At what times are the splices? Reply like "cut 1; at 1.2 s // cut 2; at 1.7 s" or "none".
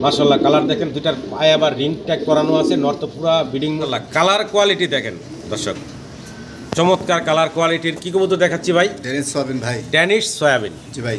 cut 1; at 3.8 s